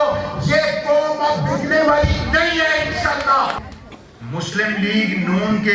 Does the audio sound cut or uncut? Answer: cut